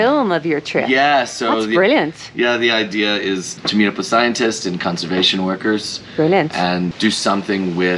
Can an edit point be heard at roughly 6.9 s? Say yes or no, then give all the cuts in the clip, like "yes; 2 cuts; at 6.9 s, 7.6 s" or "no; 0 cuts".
yes; 2 cuts; at 3.5 s, 6.9 s